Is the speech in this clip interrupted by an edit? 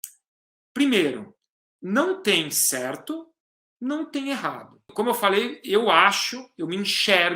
yes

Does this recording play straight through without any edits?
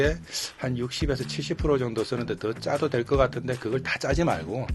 yes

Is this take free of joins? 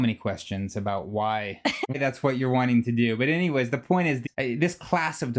no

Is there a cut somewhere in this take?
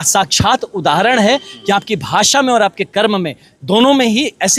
no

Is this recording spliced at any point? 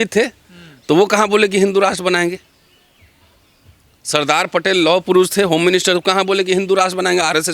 no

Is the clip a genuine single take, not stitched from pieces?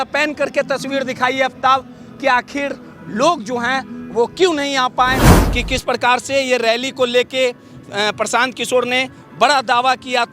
no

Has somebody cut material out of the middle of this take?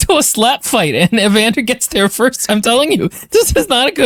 no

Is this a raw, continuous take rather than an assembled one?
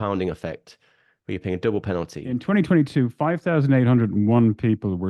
no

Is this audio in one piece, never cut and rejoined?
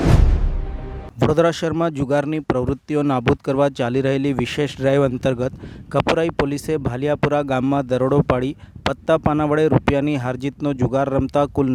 yes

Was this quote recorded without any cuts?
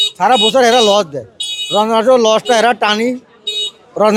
yes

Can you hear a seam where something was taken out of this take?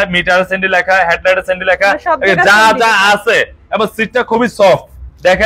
no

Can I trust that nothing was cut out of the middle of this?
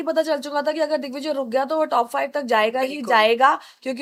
yes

